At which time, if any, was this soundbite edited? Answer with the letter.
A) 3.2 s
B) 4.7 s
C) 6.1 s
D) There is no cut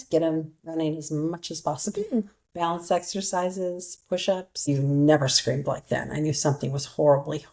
B